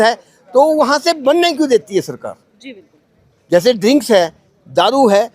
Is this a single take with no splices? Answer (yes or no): yes